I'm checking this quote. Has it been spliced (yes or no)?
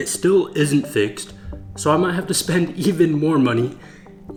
no